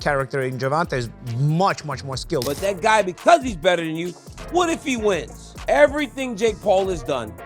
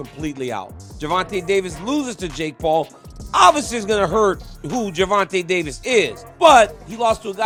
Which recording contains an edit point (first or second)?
first